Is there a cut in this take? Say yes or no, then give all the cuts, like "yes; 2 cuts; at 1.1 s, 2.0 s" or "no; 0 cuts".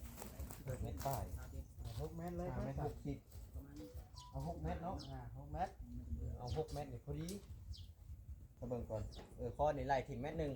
yes; 1 cut; at 8.5 s